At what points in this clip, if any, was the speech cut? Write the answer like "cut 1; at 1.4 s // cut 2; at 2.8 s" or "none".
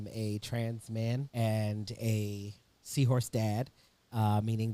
cut 1; at 1.3 s